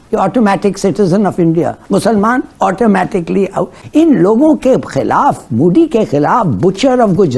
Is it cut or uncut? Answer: uncut